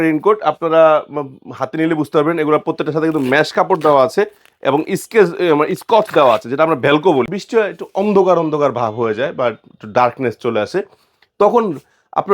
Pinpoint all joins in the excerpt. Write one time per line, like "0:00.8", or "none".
0:07.3